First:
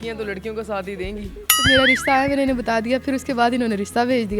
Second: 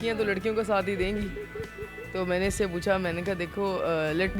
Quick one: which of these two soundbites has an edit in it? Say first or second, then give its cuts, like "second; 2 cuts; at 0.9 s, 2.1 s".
first; 1 cut; at 1.4 s